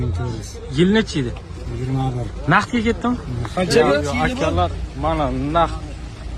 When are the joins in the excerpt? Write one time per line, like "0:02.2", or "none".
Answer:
none

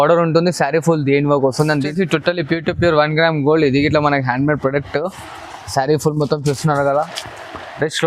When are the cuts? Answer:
0:01.9

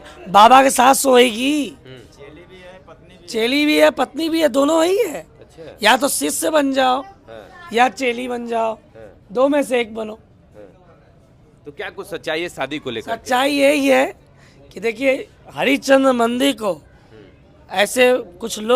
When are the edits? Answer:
none

